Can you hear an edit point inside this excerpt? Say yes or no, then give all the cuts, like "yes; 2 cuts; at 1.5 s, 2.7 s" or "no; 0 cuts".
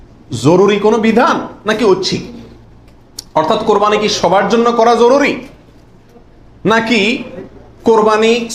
no; 0 cuts